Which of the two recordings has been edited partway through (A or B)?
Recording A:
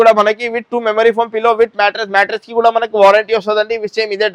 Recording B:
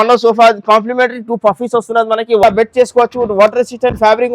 B